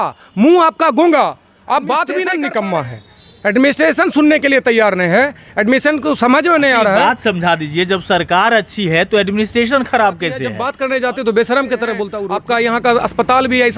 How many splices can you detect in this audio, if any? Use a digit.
3